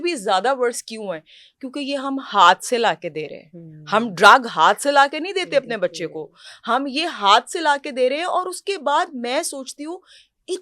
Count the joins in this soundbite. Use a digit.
0